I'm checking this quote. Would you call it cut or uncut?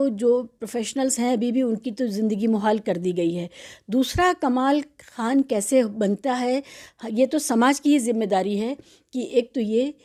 uncut